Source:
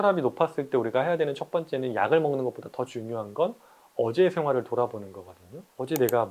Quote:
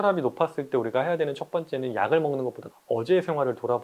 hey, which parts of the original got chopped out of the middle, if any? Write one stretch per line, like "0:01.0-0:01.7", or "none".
0:02.7-0:03.8